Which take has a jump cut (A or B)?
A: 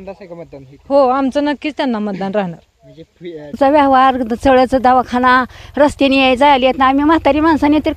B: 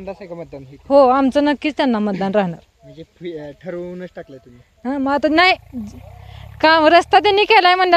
A